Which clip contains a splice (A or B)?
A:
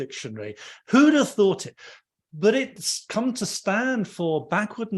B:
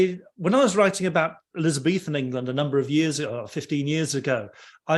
A